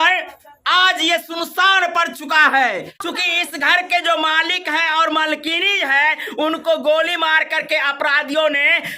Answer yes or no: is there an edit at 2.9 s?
yes